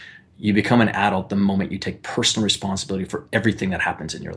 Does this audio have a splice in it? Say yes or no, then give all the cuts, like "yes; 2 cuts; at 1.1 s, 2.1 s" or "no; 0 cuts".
no; 0 cuts